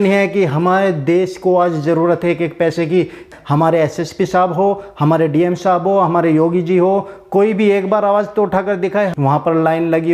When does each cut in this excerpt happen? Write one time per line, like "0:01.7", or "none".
0:03.2
0:09.1